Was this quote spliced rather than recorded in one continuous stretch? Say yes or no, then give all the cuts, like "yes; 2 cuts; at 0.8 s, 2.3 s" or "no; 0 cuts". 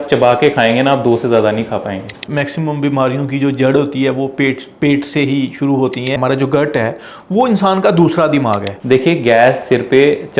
yes; 3 cuts; at 2.2 s, 6.2 s, 8.7 s